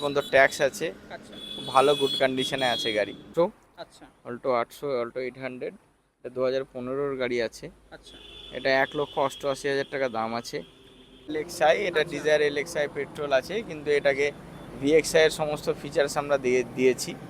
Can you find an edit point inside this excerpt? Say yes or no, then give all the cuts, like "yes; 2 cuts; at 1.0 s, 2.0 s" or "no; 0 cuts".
yes; 2 cuts; at 3.3 s, 11.4 s